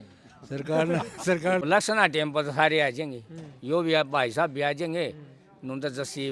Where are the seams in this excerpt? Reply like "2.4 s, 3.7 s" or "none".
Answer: 1.6 s